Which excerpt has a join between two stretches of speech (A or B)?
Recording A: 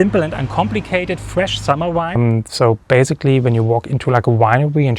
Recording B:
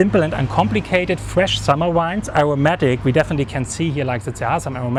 A